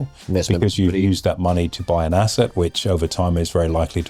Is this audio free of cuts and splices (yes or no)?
yes